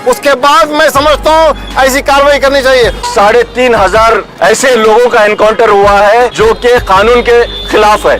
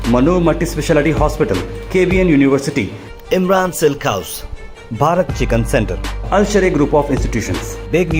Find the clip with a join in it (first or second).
first